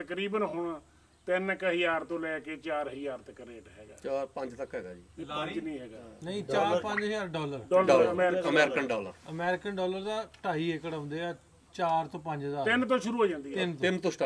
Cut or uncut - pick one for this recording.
uncut